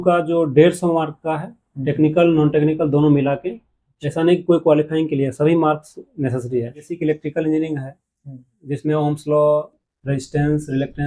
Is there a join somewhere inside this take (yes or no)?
yes